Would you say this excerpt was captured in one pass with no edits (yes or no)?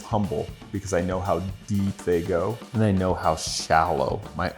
no